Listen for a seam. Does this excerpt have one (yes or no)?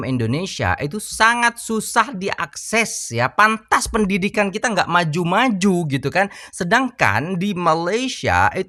no